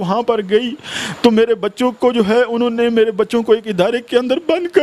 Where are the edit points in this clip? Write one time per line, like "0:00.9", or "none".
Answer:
none